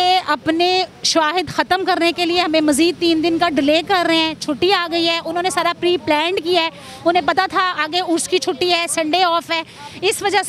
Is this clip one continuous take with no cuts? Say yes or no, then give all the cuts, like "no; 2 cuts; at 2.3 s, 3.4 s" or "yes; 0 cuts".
yes; 0 cuts